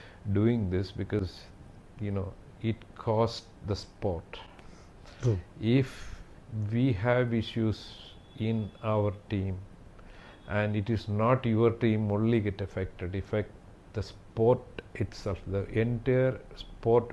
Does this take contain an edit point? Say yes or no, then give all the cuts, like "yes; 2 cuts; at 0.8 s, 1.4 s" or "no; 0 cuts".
no; 0 cuts